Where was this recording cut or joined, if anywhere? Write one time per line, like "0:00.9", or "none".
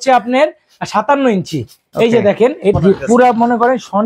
0:02.7